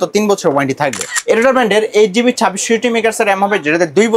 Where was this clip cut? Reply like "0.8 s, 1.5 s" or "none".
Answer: 1.1 s